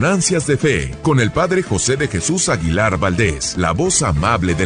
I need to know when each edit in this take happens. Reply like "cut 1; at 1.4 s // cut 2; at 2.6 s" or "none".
cut 1; at 0.9 s // cut 2; at 3.4 s